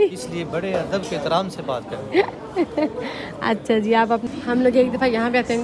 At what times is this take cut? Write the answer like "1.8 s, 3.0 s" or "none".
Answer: 4.3 s